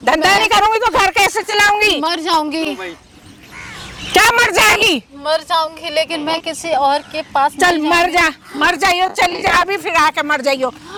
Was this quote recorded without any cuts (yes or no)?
yes